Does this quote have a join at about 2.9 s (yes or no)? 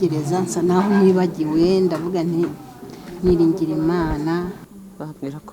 no